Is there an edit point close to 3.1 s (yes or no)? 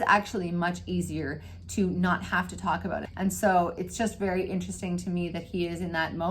yes